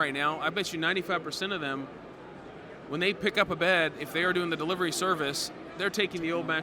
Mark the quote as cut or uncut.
uncut